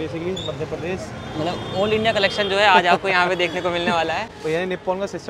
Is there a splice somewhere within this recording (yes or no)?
yes